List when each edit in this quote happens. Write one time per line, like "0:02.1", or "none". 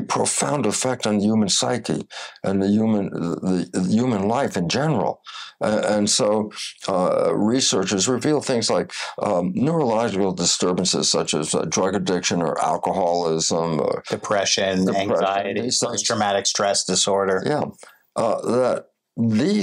none

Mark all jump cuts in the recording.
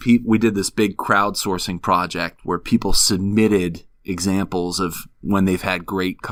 none

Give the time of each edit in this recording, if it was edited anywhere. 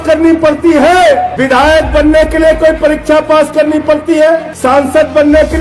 0:01.3
0:04.5

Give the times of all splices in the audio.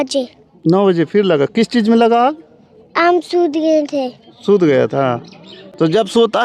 none

